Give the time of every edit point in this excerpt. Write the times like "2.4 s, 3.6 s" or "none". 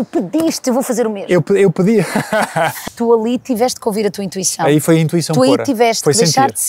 2.9 s